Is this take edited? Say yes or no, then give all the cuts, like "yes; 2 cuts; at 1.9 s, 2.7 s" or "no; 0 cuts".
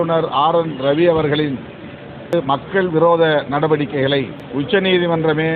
yes; 1 cut; at 4.4 s